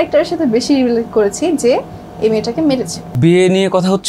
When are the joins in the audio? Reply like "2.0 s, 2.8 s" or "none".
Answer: 3.1 s